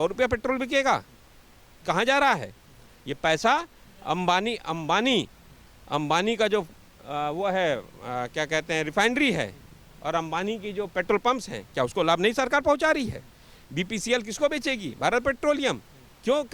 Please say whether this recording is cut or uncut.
uncut